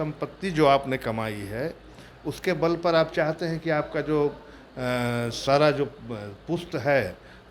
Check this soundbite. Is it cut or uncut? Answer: uncut